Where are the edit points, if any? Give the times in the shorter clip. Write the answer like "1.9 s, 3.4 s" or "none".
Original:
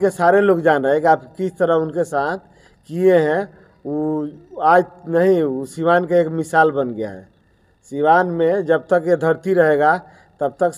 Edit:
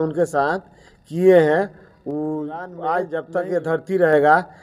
3.2 s